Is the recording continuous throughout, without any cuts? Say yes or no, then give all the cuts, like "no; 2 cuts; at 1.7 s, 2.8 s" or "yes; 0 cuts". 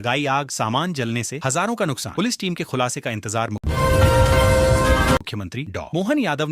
no; 2 cuts; at 3.5 s, 5.2 s